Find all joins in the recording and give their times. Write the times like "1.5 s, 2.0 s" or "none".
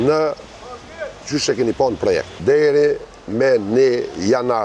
2.4 s